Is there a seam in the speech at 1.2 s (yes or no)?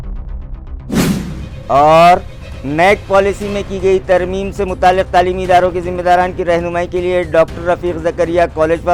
no